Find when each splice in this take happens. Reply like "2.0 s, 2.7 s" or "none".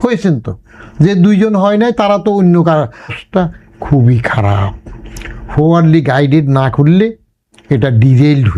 3.2 s